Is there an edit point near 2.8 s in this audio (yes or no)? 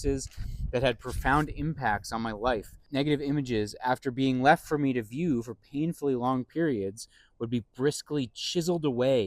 yes